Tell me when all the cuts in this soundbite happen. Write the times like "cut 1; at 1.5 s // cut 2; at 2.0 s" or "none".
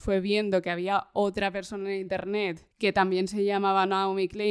cut 1; at 2.7 s